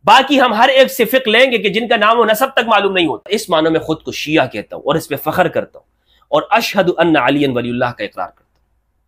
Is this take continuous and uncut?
no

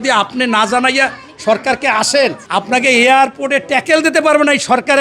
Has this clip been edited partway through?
yes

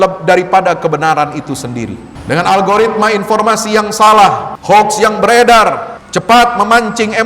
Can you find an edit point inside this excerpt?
yes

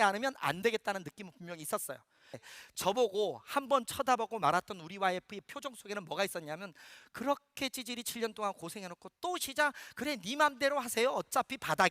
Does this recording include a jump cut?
yes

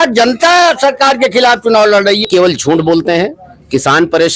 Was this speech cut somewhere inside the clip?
yes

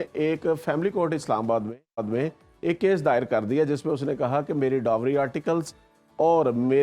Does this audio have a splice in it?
no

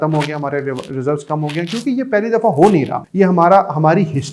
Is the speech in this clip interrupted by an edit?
yes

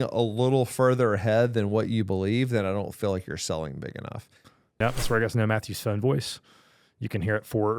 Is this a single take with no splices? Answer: no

